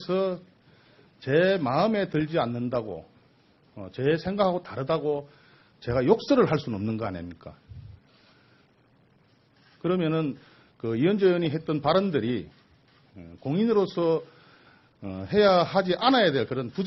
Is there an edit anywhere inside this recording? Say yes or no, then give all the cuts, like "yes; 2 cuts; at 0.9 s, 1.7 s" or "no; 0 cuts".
yes; 1 cut; at 7.4 s